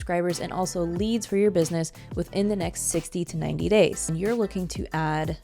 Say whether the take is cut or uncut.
cut